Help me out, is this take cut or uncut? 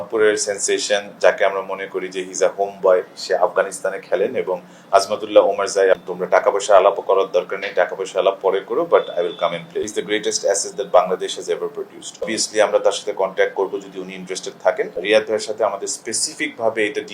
cut